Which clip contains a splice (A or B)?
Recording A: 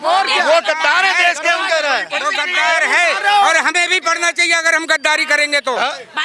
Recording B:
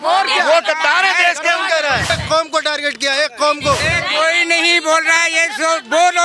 B